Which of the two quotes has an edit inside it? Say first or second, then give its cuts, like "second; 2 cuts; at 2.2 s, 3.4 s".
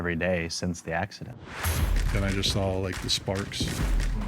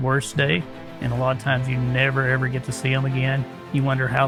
first; 1 cut; at 1.4 s